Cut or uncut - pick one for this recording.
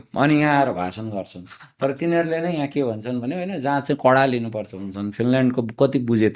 uncut